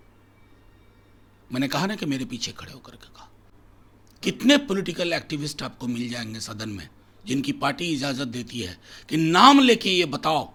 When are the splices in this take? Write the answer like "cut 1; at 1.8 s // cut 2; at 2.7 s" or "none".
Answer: none